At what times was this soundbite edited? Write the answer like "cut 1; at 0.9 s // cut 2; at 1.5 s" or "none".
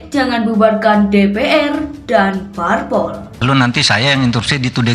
cut 1; at 3.2 s